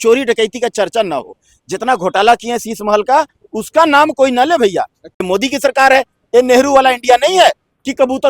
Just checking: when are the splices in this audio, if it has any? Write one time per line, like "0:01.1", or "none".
0:05.2